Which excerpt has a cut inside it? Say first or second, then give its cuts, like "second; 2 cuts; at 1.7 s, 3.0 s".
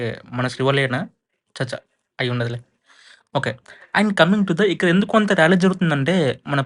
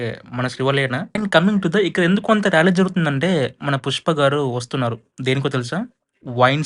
second; 1 cut; at 1.2 s